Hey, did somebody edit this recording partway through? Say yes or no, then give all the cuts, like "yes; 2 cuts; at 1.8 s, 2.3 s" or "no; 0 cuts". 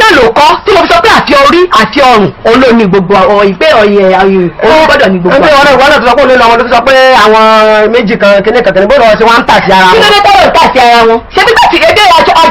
no; 0 cuts